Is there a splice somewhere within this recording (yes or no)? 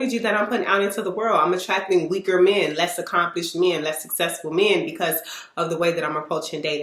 no